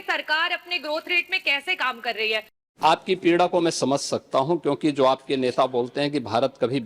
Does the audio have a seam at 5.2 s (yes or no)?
no